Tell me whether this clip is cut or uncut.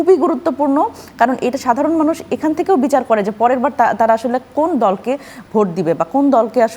uncut